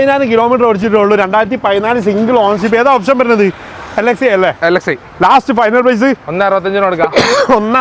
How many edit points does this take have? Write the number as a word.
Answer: zero